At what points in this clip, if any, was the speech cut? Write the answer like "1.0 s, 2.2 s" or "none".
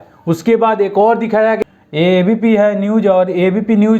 1.6 s